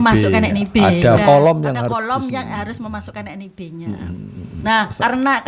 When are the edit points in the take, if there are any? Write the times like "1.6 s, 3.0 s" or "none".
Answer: 1.2 s, 4.5 s